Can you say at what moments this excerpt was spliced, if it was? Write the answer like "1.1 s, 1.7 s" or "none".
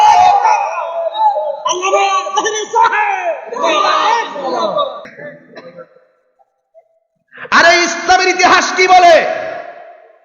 5.2 s